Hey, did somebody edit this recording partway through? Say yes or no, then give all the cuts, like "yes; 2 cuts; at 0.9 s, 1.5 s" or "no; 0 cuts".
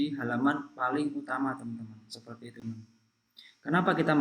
yes; 1 cut; at 2.6 s